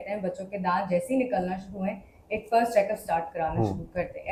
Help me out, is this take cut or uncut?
uncut